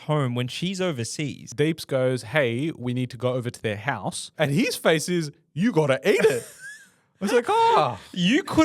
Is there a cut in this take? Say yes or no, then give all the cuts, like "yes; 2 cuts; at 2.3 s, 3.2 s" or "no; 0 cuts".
yes; 2 cuts; at 1.4 s, 4.3 s